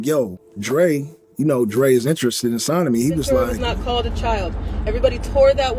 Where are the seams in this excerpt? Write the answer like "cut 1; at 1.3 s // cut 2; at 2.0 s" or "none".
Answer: cut 1; at 3.3 s